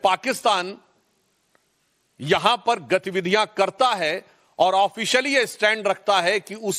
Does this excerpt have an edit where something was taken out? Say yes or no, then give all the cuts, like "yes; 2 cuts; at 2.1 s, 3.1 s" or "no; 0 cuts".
no; 0 cuts